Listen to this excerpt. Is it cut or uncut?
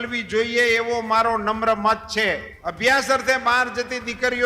cut